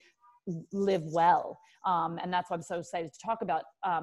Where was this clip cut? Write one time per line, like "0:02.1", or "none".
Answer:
none